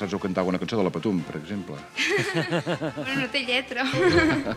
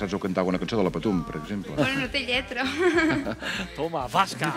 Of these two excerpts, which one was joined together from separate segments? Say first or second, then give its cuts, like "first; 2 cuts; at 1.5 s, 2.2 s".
second; 1 cut; at 1.7 s